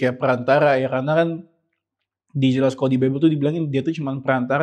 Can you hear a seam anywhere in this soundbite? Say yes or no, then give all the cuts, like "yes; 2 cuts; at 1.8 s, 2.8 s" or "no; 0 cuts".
no; 0 cuts